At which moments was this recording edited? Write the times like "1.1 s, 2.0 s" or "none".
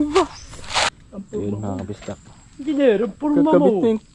1.0 s